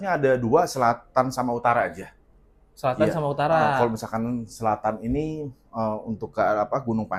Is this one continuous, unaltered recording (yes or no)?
yes